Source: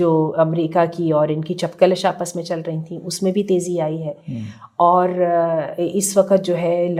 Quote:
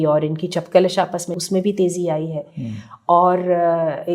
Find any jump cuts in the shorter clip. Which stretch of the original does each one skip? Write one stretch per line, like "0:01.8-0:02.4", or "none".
0:02.4-0:03.0

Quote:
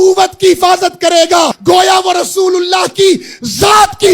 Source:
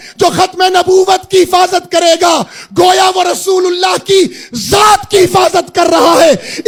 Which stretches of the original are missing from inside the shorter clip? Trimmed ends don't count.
0:02.5-0:02.7

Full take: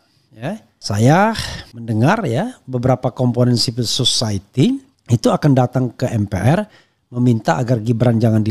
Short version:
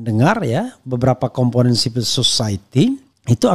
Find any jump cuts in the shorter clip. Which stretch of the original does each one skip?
none

